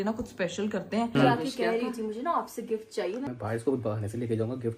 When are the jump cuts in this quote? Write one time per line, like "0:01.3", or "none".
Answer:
0:01.1
0:03.3